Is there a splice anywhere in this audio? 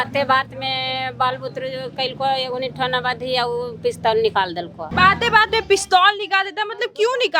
no; 0 cuts

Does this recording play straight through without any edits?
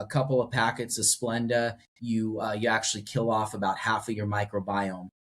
yes; 0 cuts

